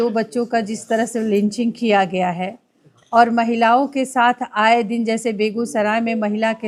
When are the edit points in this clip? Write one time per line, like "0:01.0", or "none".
none